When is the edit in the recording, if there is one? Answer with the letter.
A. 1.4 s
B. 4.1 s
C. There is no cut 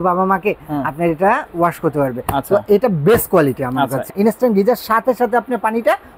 B